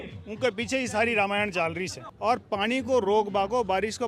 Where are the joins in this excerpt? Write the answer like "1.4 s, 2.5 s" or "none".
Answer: 2.0 s

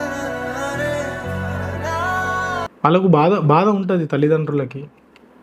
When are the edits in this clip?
2.7 s

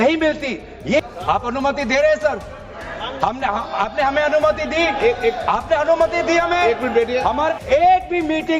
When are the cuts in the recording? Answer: 1.0 s, 7.6 s

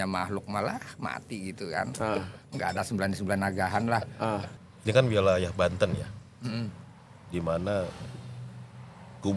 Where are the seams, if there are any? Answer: 4.5 s

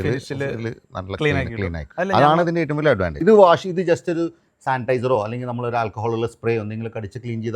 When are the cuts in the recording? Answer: 3.2 s

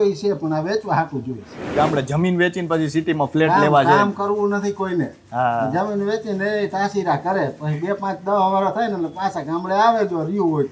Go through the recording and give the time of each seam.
1.7 s

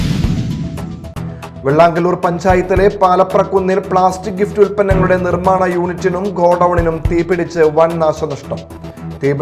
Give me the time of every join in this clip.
1.0 s

